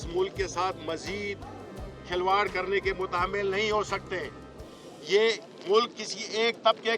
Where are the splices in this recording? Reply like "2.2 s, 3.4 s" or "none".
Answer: none